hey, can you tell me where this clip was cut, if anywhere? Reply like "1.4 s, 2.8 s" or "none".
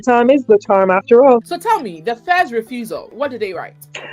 1.5 s